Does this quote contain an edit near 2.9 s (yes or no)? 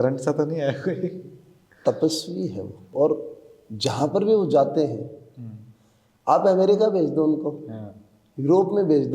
yes